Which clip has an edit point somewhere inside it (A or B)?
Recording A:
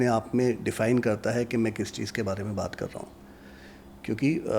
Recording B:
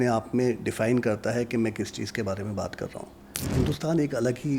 B